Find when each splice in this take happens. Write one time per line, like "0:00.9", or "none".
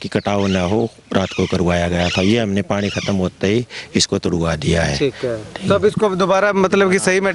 none